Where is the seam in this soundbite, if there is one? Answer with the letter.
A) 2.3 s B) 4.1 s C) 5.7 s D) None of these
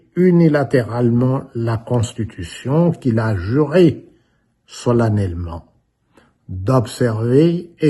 D